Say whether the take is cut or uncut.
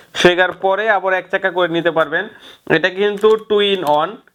uncut